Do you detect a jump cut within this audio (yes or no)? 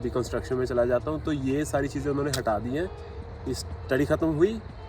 no